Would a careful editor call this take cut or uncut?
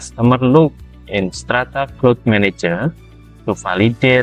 uncut